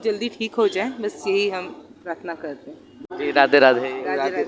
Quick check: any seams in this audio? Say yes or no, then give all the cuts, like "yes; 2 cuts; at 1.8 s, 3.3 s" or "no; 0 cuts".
no; 0 cuts